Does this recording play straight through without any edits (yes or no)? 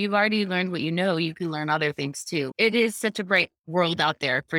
no